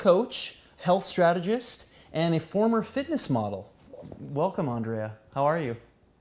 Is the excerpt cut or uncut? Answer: cut